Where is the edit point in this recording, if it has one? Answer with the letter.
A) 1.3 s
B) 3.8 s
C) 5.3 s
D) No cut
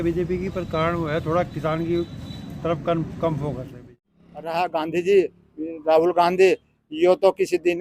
B